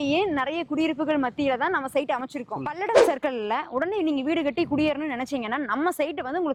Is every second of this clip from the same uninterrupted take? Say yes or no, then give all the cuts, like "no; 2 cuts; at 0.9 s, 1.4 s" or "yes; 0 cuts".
yes; 0 cuts